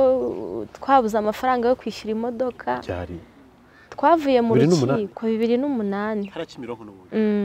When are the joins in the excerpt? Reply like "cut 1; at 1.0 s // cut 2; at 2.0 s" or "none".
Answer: none